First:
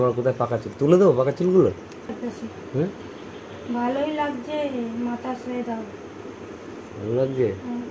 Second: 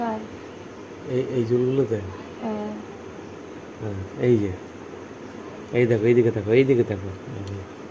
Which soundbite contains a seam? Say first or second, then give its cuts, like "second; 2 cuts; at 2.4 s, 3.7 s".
first; 1 cut; at 2.1 s